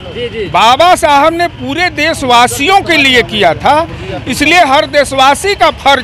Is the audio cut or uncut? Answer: uncut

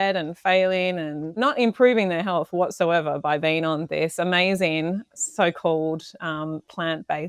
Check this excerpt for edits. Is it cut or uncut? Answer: cut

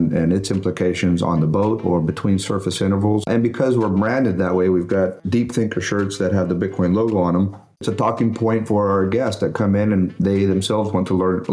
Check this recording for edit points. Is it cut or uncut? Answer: cut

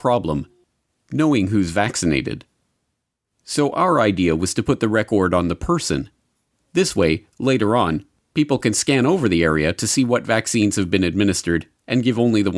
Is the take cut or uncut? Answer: uncut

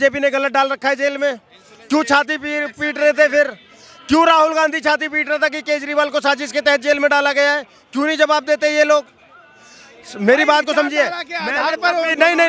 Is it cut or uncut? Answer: uncut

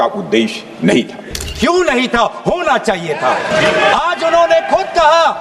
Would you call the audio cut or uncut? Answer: cut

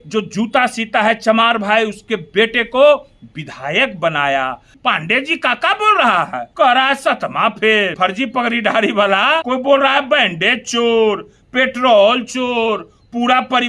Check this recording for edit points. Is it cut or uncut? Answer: cut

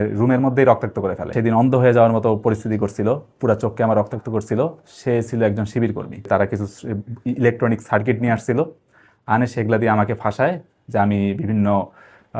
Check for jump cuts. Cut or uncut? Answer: cut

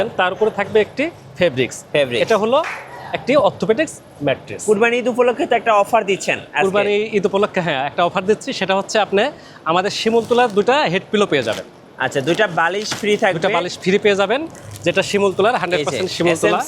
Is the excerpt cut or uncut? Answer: cut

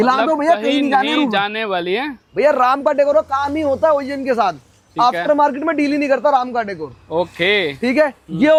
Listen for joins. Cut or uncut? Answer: uncut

